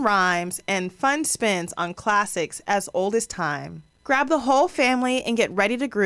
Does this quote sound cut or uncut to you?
uncut